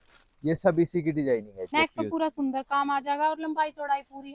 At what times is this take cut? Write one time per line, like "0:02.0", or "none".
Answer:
0:01.6